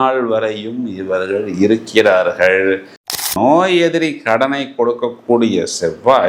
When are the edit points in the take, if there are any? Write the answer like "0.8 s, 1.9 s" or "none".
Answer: 3.2 s

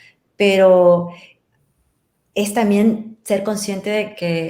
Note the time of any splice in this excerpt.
none

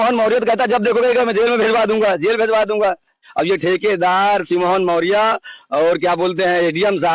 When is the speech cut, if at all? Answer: 3.2 s

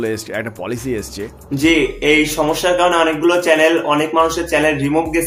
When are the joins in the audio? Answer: 1.5 s

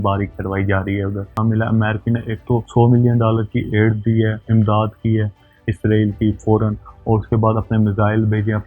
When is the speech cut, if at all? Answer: 1.3 s

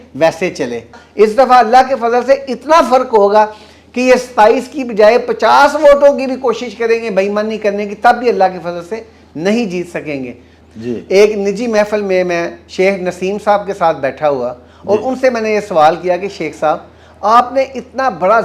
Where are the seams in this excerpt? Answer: 1.0 s, 10.5 s

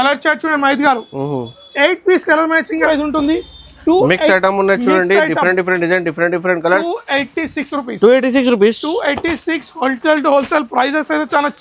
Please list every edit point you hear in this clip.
2.8 s

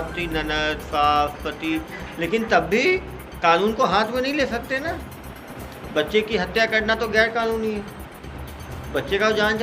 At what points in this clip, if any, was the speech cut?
none

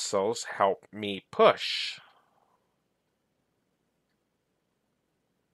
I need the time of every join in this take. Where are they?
none

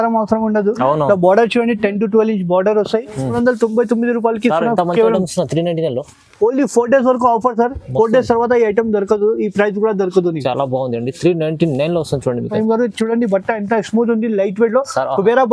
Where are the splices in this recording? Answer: 3.3 s, 12.5 s

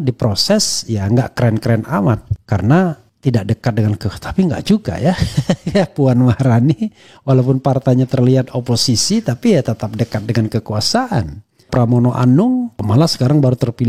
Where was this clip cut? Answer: 2.3 s, 3.1 s, 11.7 s, 12.8 s

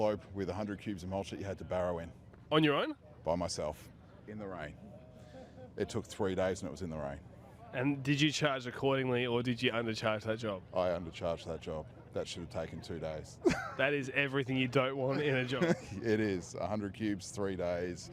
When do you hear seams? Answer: none

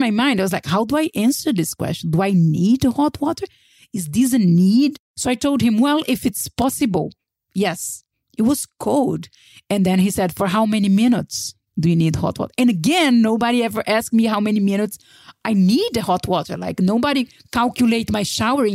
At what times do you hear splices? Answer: 5.1 s

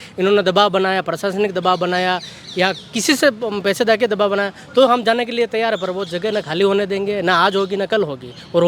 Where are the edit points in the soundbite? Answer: none

